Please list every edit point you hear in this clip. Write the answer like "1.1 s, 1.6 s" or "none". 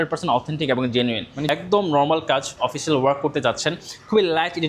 1.4 s